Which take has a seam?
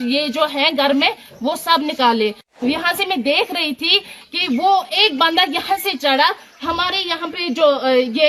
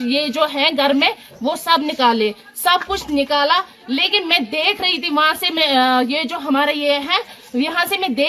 first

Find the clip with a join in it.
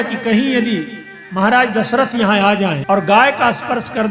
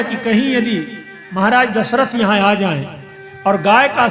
first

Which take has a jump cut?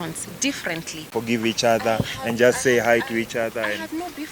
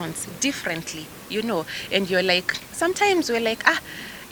first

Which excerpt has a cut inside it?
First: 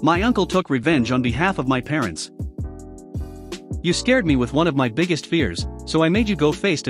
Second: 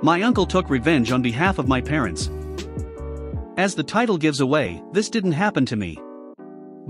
first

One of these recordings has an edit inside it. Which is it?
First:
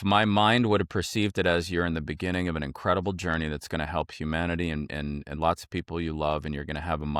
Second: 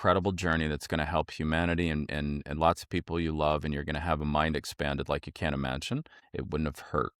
second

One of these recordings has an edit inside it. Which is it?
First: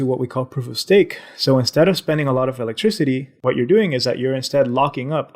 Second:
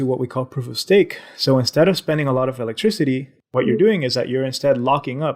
first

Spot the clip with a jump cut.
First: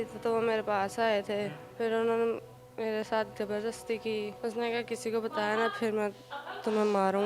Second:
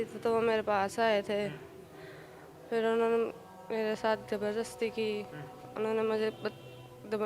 first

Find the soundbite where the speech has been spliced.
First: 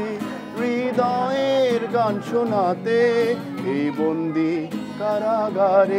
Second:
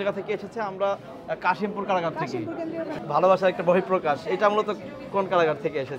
second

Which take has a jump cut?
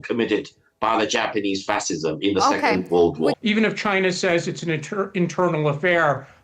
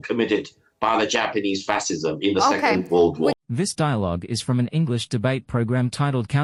first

